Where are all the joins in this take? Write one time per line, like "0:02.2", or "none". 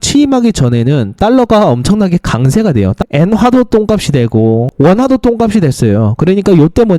0:03.0
0:04.7